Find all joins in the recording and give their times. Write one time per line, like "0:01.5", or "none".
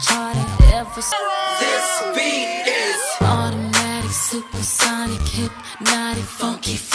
0:01.1